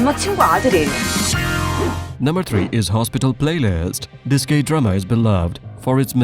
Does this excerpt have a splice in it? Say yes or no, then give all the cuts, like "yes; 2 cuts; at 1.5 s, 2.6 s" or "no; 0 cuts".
no; 0 cuts